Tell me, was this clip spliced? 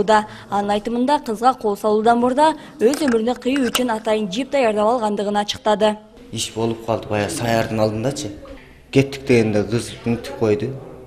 no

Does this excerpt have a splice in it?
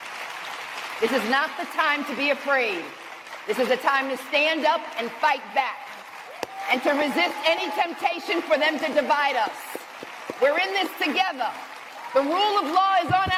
no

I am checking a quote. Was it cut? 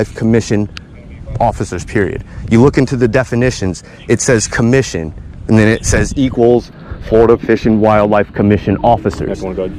no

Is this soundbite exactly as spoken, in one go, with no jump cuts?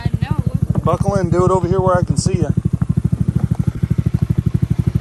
yes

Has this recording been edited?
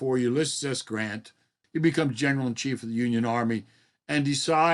yes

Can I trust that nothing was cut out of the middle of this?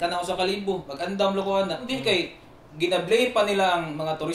no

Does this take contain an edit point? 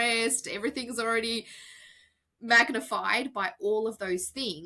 no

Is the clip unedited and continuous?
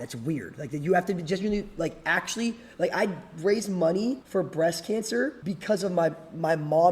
no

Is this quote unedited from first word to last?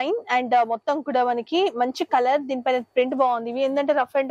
yes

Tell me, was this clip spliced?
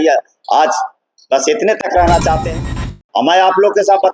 yes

